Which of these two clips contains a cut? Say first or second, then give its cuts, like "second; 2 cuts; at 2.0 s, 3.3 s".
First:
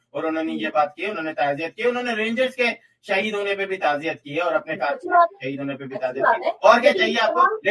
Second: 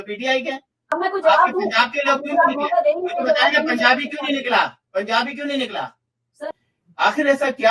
second; 2 cuts; at 0.9 s, 6.4 s